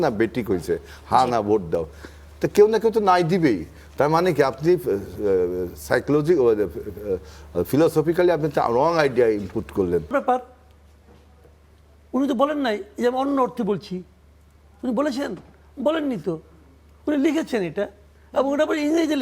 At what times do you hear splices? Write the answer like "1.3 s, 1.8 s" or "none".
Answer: 10.1 s